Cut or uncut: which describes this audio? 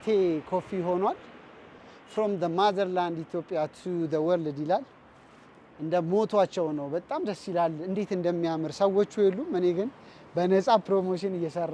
uncut